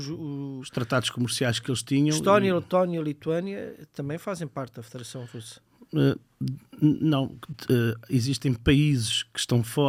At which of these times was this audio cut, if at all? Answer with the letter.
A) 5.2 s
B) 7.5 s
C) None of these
C